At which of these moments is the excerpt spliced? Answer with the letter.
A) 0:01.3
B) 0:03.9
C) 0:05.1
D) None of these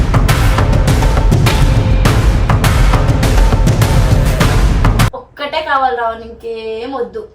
C